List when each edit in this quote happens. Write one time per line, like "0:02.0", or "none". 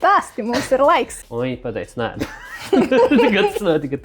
0:01.2